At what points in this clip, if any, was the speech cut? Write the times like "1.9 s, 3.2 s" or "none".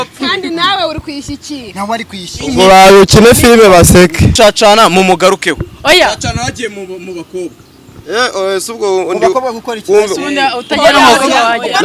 4.3 s